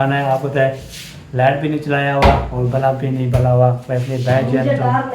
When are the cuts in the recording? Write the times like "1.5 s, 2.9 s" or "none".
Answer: none